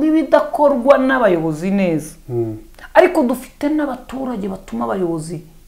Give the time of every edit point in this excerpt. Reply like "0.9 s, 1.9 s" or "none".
none